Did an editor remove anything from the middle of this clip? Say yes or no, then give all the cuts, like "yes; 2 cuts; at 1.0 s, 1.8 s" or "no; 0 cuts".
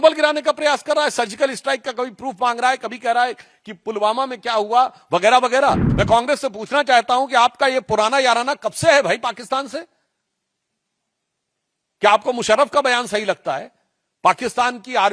yes; 1 cut; at 5.9 s